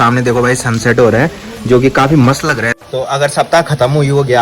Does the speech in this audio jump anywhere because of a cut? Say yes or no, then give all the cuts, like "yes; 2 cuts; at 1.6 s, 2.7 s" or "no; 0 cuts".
yes; 1 cut; at 2.8 s